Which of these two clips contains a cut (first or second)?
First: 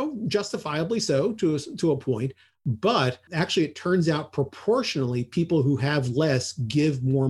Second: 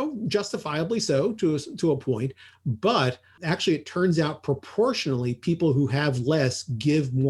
first